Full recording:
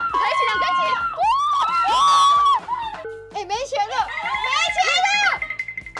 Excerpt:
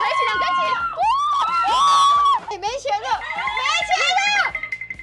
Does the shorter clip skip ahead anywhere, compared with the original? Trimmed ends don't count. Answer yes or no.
yes